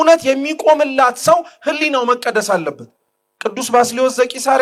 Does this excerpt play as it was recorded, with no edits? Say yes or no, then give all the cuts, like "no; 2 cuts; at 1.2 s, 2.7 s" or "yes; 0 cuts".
yes; 0 cuts